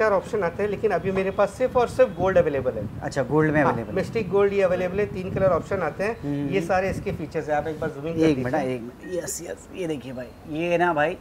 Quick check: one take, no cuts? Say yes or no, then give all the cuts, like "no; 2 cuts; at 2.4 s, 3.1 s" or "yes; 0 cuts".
yes; 0 cuts